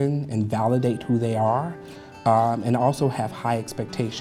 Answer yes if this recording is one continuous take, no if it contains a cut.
yes